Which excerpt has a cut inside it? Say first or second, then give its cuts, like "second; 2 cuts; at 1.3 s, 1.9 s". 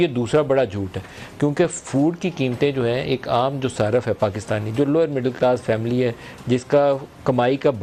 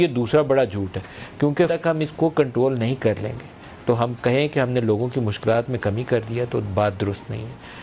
second; 1 cut; at 1.8 s